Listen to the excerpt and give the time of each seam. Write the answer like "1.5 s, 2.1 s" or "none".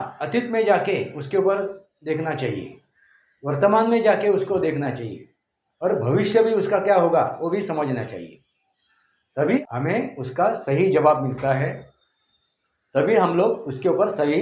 9.6 s